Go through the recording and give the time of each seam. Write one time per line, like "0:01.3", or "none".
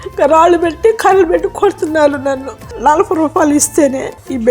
0:02.6